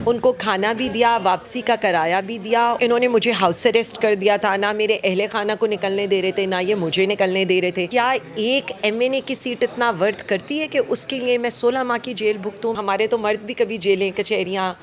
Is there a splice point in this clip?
yes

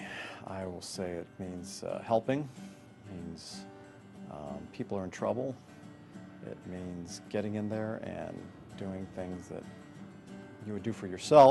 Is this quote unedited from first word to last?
yes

